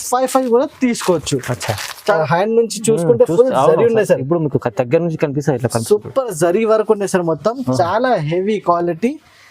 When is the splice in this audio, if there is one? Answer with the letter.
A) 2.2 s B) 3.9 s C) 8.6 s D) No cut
A